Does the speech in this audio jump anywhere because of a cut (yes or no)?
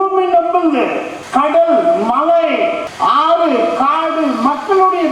yes